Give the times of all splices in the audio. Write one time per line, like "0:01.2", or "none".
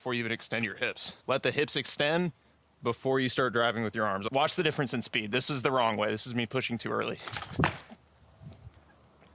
0:01.1
0:04.3
0:07.4
0:08.0